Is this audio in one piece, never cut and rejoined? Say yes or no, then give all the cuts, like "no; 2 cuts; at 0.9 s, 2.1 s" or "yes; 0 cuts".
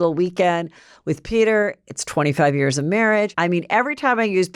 no; 1 cut; at 3.3 s